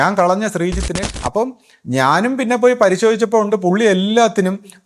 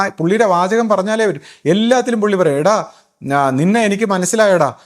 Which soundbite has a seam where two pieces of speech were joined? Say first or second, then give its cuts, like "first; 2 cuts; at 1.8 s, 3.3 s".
first; 1 cut; at 1.0 s